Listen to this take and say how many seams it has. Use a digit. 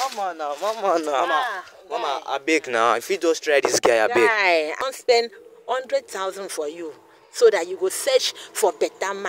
1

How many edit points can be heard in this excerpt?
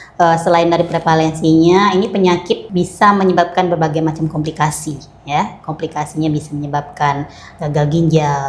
1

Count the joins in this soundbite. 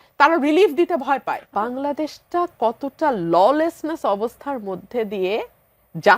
1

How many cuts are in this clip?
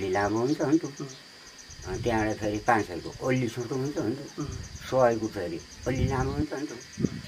0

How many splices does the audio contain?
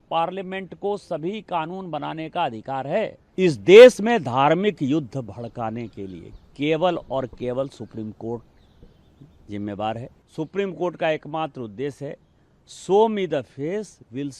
2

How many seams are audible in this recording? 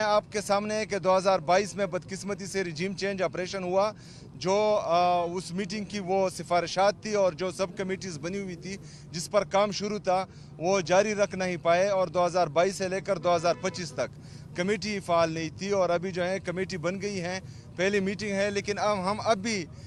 0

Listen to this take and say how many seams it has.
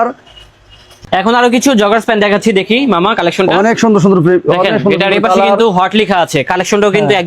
1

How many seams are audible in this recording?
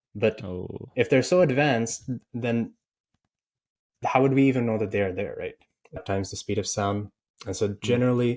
1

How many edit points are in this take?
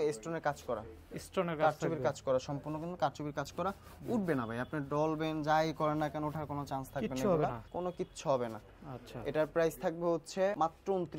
0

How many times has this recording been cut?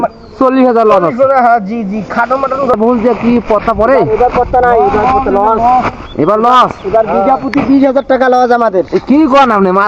1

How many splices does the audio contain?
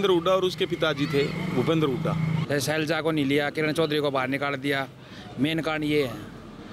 1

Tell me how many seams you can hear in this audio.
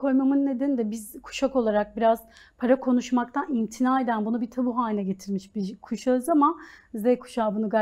0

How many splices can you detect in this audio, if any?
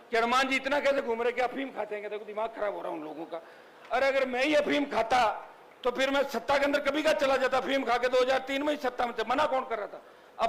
0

